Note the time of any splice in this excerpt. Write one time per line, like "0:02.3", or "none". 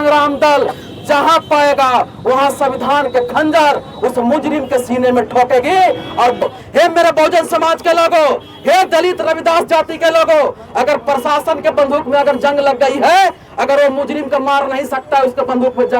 0:06.4